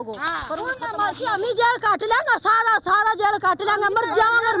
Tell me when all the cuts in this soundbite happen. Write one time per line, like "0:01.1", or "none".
none